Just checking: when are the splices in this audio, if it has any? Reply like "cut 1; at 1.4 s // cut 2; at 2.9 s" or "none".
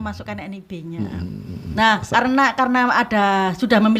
cut 1; at 1.6 s

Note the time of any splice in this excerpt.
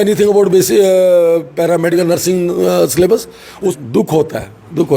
cut 1; at 3.5 s

